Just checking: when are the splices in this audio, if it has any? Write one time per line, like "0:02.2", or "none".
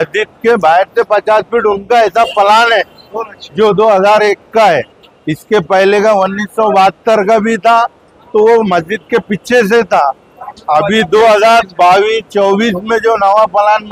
none